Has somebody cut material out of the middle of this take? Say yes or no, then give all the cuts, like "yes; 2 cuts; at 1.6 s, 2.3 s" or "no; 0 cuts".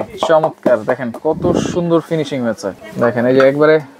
yes; 1 cut; at 2.7 s